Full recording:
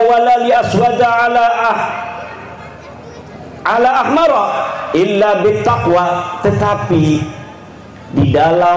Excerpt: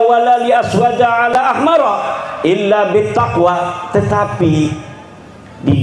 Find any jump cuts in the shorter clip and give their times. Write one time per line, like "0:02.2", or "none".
0:01.3